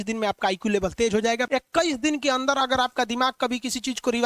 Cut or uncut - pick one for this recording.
cut